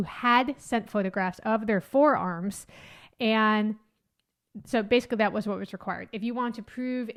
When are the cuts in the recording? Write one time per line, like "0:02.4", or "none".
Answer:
none